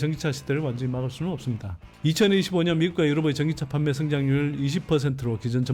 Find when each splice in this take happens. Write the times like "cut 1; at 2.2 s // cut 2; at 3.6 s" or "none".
cut 1; at 1.9 s

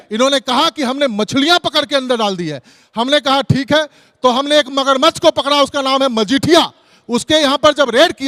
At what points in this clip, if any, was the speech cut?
none

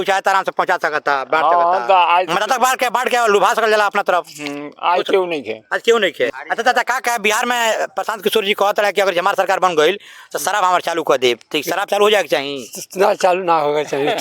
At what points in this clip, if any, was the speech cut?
cut 1; at 6.4 s

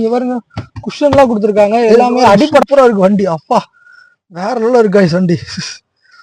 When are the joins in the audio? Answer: cut 1; at 2.6 s

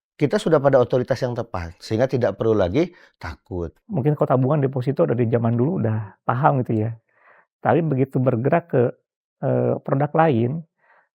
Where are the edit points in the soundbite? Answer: cut 1; at 3.8 s

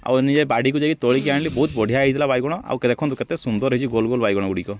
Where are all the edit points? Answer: none

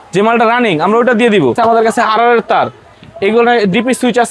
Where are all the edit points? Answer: cut 1; at 1.6 s

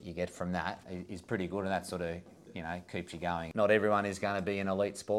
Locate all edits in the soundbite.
cut 1; at 0.9 s // cut 2; at 3.5 s

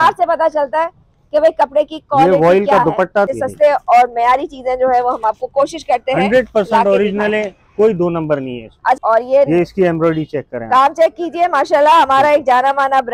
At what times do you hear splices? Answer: cut 1; at 3.3 s // cut 2; at 9.0 s

